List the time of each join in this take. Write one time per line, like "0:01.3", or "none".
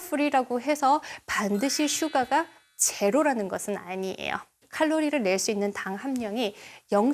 0:04.7

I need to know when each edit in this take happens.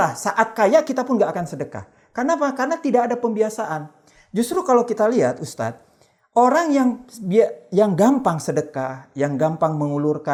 none

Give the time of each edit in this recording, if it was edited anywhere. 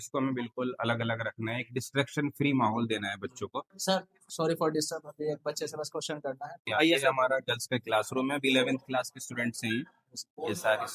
0:03.9
0:06.7

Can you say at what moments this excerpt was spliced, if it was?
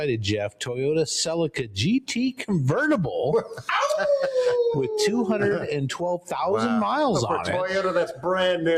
none

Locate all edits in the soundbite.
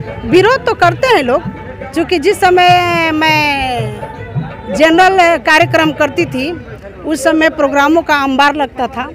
none

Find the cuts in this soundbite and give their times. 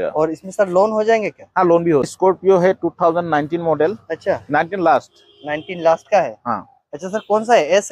0:02.1

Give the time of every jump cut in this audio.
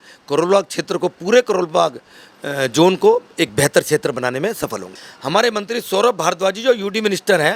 0:04.8

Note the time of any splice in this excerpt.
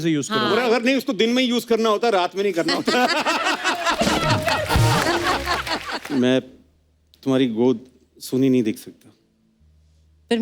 0:05.9

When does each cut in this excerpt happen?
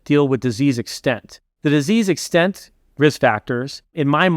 none

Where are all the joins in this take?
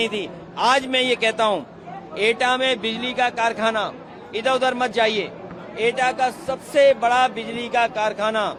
none

